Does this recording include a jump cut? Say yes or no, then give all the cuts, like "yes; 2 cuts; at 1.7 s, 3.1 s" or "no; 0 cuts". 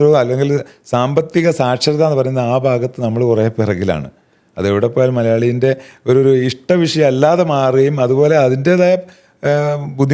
no; 0 cuts